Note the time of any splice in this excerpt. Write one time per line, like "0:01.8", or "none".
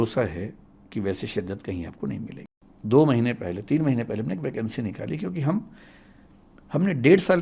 0:02.4